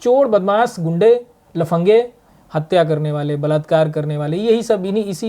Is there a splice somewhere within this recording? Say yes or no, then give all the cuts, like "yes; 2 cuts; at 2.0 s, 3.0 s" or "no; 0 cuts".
yes; 1 cut; at 2.2 s